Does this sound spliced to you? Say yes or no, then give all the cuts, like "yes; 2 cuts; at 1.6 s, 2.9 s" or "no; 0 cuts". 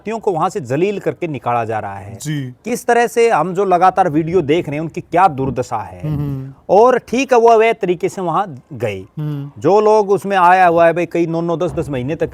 no; 0 cuts